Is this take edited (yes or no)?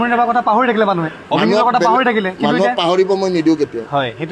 no